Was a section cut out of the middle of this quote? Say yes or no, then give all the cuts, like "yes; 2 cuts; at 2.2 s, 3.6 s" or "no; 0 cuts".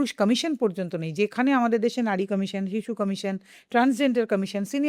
no; 0 cuts